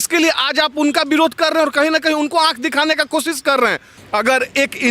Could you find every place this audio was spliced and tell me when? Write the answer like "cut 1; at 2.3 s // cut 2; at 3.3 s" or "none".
cut 1; at 3.9 s